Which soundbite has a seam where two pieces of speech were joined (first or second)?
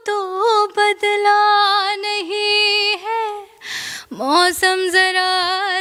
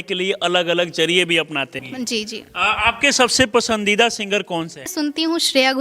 second